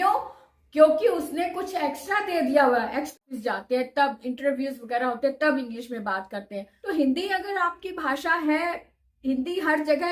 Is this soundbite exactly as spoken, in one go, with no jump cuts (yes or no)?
no